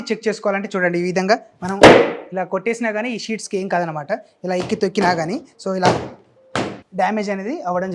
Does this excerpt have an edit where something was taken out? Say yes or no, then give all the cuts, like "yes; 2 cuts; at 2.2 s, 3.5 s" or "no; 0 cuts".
no; 0 cuts